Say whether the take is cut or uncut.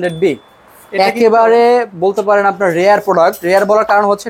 uncut